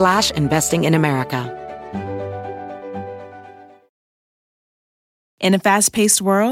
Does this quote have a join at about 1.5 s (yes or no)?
yes